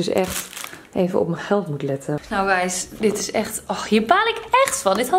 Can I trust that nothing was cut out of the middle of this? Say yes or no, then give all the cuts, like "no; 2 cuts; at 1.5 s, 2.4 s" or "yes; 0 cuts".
no; 1 cut; at 2.3 s